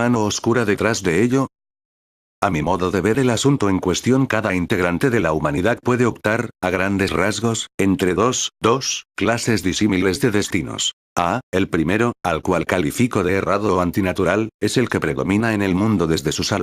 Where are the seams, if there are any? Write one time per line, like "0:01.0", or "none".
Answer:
0:05.0